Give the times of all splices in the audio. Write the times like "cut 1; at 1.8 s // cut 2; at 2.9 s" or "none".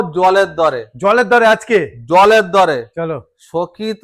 none